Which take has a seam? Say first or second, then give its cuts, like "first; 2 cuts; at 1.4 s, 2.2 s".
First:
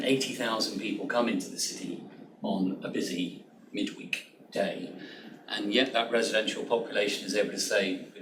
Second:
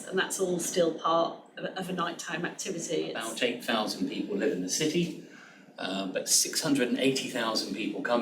second; 1 cut; at 3.2 s